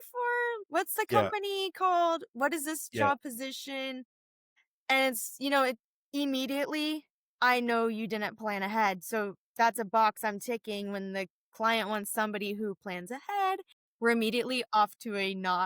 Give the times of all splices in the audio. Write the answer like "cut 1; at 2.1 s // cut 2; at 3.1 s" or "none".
cut 1; at 13.8 s